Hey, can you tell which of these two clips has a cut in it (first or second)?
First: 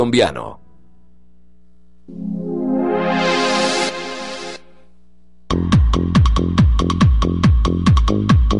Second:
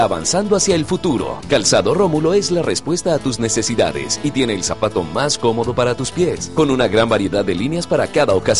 first